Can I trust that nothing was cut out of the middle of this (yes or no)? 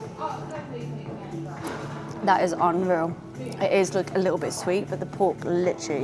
yes